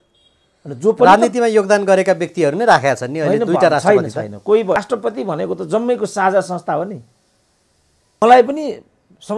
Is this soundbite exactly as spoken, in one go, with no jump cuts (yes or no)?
no